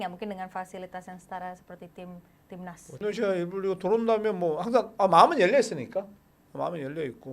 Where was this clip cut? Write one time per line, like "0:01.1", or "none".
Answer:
0:03.0